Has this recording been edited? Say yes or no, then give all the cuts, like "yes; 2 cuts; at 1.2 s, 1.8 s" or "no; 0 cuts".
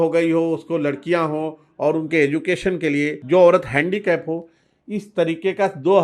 yes; 1 cut; at 3.2 s